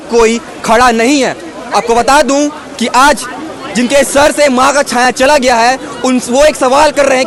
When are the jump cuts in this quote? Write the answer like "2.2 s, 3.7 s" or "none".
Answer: none